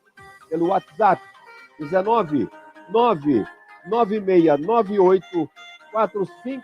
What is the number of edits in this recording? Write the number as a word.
one